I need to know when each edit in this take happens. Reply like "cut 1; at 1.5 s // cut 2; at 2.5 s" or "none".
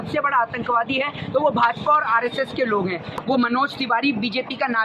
cut 1; at 3.1 s